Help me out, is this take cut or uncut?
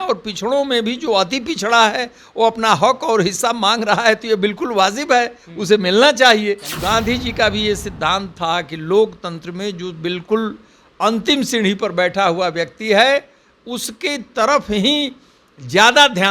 cut